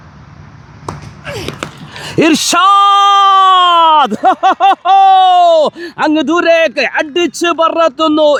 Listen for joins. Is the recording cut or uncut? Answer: uncut